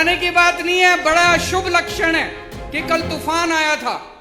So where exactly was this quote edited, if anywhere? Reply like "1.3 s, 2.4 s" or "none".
none